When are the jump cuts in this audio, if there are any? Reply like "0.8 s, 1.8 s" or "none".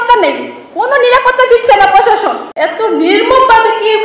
2.4 s